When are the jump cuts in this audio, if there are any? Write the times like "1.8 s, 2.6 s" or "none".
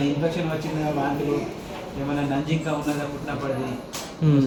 none